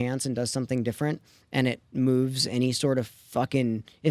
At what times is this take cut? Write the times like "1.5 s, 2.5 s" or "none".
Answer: 1.8 s